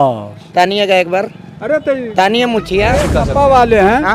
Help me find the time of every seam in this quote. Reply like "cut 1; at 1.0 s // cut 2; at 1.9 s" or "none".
cut 1; at 3.0 s